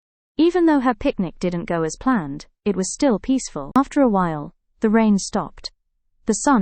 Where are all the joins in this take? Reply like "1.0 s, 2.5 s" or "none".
3.8 s